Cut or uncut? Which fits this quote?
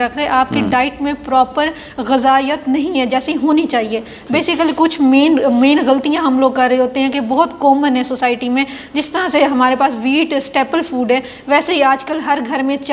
uncut